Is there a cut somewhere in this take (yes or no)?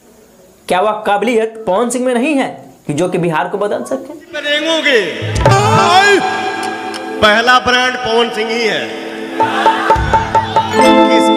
yes